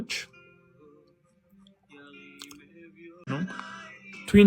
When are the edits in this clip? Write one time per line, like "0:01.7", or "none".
0:03.3